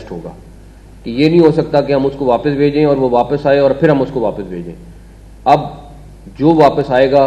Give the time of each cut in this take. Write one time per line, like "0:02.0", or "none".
none